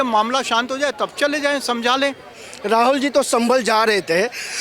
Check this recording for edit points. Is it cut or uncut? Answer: cut